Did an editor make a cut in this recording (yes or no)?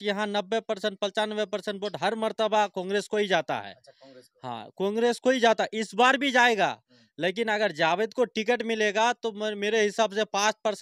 no